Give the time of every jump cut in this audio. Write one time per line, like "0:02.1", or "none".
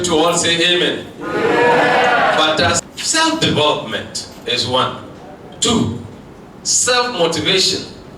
0:02.9